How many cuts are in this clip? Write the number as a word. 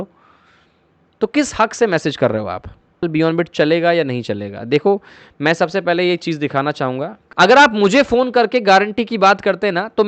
two